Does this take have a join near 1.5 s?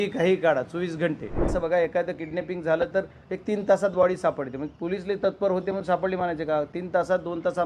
yes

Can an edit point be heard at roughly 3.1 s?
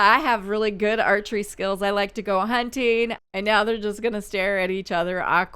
yes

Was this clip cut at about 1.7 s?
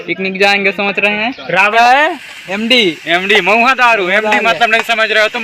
yes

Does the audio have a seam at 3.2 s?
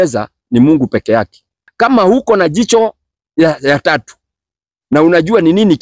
no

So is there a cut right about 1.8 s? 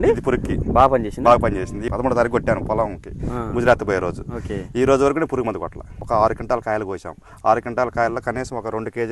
yes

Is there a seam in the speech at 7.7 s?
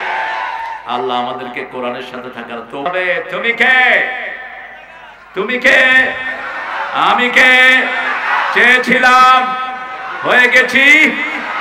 no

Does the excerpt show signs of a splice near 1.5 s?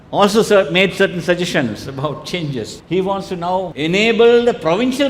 no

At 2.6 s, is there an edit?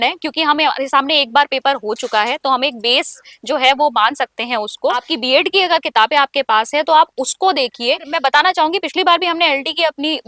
no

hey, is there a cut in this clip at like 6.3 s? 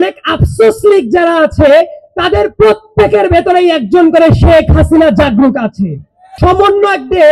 yes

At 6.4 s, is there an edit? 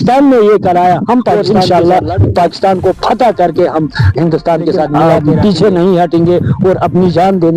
no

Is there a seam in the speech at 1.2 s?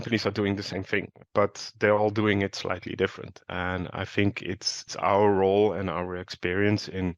yes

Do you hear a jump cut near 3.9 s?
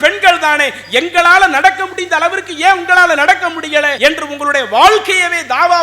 yes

